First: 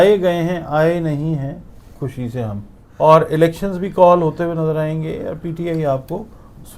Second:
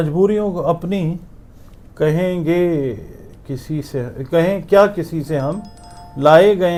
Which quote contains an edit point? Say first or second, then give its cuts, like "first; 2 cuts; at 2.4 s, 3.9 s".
first; 1 cut; at 2.8 s